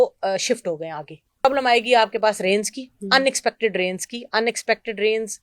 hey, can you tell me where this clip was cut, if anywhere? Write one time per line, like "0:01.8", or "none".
0:01.4